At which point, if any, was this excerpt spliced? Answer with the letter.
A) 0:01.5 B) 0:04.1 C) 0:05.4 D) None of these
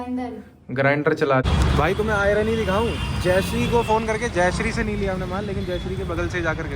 A